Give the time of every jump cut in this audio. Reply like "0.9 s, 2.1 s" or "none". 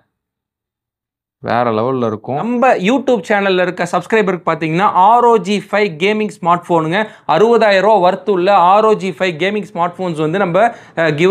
2.4 s